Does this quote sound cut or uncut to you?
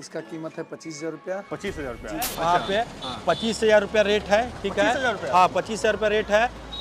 cut